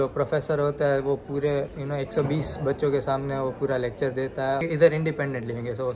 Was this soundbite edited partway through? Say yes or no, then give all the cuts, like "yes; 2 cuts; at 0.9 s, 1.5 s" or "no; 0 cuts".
yes; 1 cut; at 4.6 s